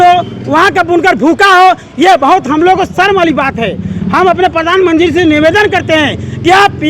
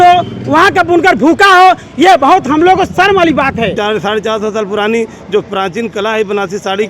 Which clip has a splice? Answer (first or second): second